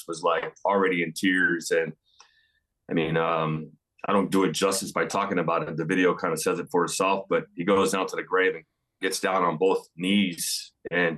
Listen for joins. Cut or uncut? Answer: uncut